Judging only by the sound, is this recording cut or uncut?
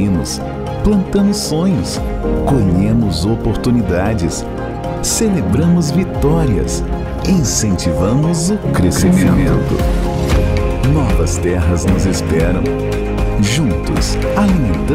uncut